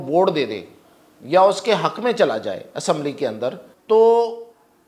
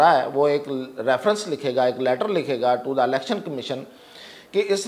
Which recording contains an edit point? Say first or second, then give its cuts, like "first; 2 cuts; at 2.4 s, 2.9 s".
first; 1 cut; at 3.7 s